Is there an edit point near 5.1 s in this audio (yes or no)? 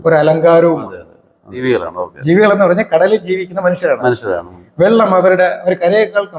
no